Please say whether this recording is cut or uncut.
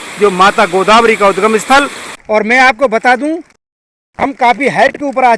cut